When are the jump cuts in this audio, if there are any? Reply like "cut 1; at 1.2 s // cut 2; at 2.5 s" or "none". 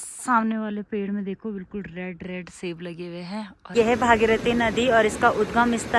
cut 1; at 3.6 s